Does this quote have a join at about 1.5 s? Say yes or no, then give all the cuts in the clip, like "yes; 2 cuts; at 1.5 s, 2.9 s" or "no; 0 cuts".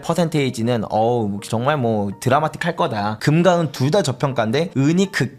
no; 1 cut; at 3.2 s